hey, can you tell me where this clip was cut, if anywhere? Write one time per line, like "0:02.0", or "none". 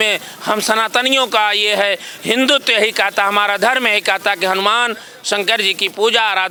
none

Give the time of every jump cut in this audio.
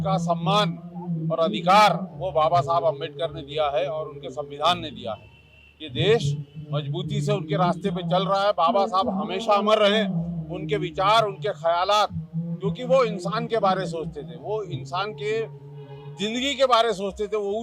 none

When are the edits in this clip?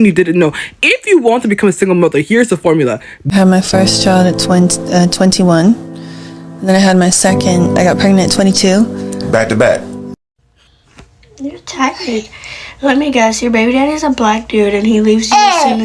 0:03.1
0:10.0

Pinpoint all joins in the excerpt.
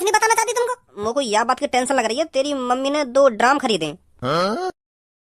0:00.9

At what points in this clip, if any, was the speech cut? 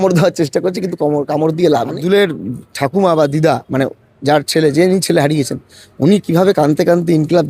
0:01.9

